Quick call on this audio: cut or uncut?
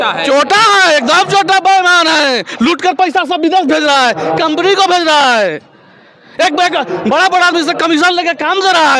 uncut